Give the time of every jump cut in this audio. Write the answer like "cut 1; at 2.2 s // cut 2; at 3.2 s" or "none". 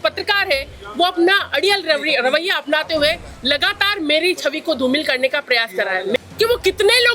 cut 1; at 6.2 s